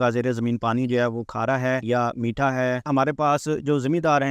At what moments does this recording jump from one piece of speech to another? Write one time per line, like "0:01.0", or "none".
0:01.8
0:02.9